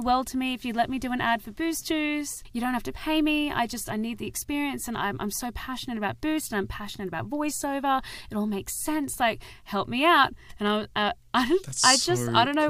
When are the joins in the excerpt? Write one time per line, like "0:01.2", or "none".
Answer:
none